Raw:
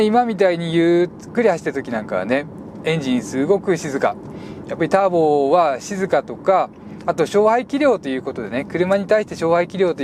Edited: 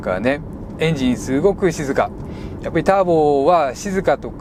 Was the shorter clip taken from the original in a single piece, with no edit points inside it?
yes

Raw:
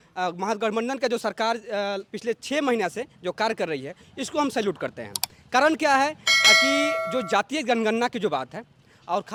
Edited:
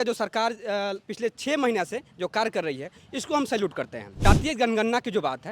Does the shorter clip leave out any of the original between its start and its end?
yes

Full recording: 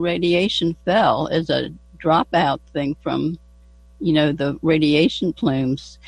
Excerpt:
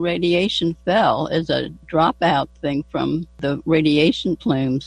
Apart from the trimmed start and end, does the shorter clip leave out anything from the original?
yes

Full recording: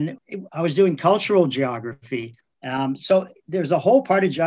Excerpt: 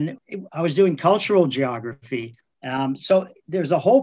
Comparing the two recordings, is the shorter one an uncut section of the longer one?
yes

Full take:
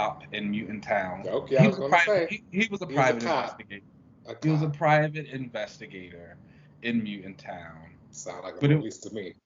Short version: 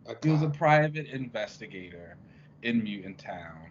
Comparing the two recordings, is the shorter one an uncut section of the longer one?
yes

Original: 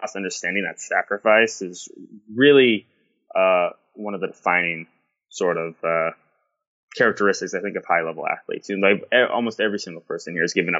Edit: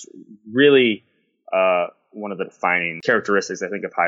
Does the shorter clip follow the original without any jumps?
no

